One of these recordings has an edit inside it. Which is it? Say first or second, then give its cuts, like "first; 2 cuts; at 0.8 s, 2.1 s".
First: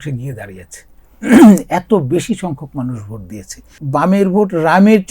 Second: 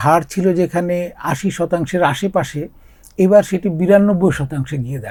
first; 1 cut; at 3.8 s